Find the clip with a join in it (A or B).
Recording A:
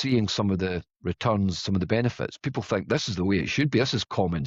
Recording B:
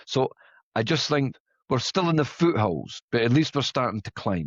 B